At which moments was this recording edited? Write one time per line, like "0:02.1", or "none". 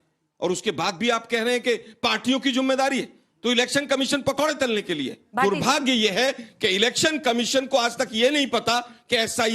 0:05.2